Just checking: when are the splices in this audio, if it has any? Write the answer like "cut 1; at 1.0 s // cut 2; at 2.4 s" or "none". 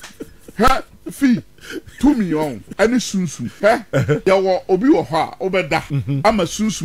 cut 1; at 2.6 s // cut 2; at 3.8 s // cut 3; at 6.0 s